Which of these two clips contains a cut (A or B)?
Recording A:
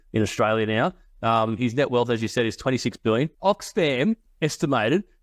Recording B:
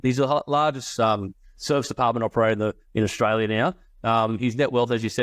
A